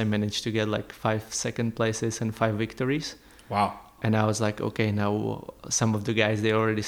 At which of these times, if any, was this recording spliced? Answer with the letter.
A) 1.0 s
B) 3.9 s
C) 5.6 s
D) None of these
B